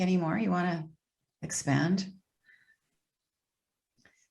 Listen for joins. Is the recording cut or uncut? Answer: uncut